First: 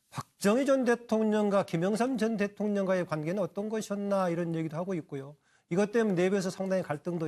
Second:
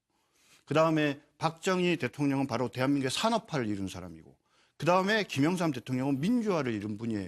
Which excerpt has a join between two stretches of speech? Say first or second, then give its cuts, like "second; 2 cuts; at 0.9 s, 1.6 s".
first; 1 cut; at 6.0 s